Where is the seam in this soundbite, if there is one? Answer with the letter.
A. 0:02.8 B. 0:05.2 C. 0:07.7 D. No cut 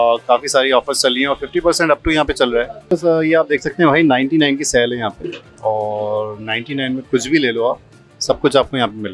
A